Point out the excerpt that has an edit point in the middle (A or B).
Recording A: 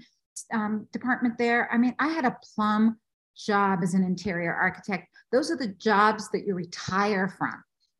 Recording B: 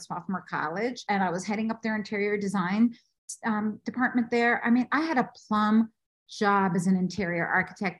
B